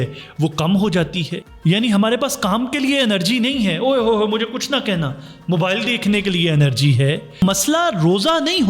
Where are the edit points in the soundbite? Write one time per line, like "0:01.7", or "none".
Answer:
0:01.5
0:07.4